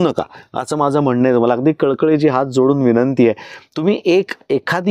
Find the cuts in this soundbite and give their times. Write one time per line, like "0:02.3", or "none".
none